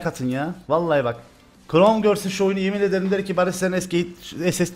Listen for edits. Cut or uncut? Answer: uncut